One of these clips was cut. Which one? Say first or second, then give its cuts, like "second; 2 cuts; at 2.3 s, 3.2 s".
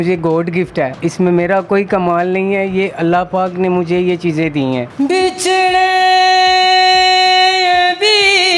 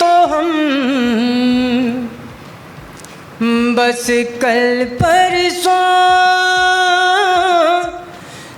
first; 2 cuts; at 0.9 s, 4.9 s